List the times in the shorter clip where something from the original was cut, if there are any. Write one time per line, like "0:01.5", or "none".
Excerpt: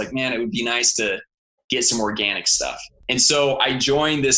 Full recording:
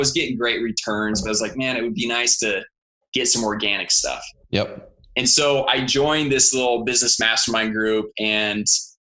0:02.9